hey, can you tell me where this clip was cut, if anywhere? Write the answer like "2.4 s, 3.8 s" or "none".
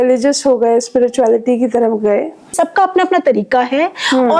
2.5 s